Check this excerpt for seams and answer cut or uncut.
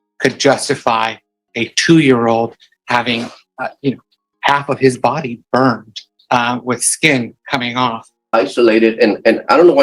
cut